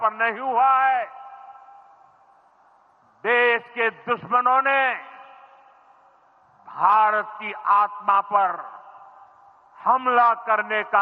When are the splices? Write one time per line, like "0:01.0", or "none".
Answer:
none